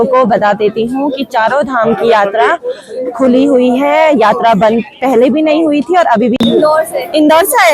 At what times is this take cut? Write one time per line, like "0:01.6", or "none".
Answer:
0:06.3